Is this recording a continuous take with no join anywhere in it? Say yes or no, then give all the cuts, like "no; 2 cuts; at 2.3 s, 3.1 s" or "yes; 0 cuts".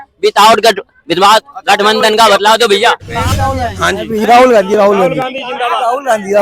no; 1 cut; at 3.4 s